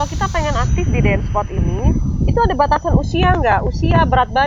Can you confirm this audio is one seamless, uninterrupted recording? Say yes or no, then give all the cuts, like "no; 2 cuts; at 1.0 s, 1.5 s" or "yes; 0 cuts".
yes; 0 cuts